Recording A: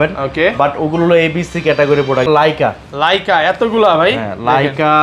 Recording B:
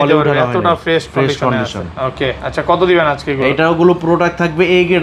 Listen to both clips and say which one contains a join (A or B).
A